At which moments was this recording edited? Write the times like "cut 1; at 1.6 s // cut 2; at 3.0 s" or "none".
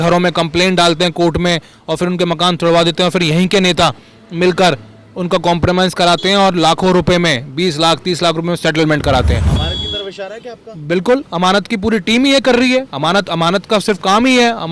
none